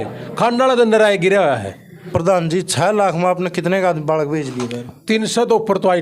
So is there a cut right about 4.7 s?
no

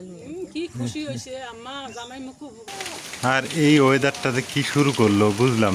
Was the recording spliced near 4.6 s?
no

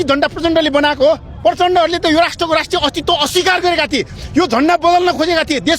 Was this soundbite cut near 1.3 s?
yes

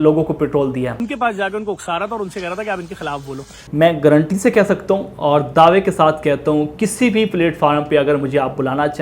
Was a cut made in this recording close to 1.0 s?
yes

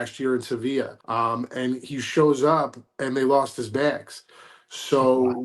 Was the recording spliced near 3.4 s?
no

